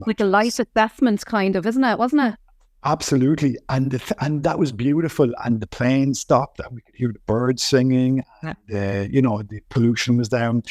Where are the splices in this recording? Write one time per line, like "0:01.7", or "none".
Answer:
none

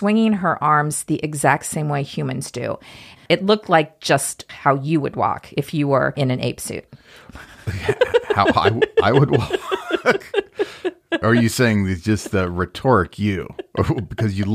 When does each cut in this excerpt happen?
0:03.2
0:04.4
0:06.1

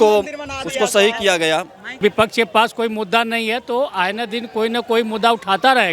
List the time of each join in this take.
0:02.0

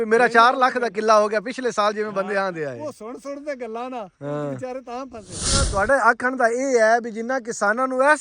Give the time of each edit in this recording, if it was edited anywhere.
0:05.7

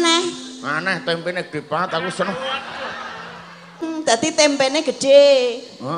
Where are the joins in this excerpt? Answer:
0:03.8

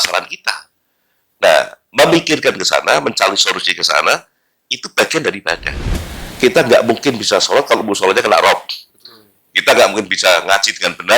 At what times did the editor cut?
0:05.8

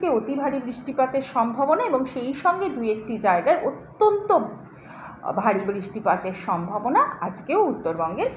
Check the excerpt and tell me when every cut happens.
none

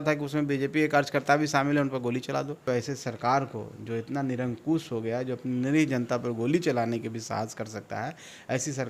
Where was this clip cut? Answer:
0:02.6

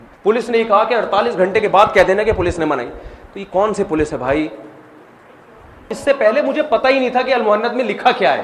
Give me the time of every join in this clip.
0:05.9

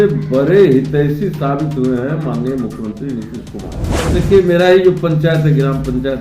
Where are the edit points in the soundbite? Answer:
0:04.0

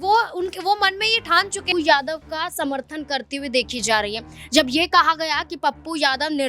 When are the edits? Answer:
0:01.6

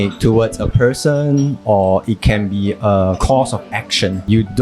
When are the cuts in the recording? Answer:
0:03.2

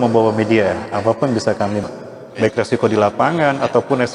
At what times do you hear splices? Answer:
0:01.8

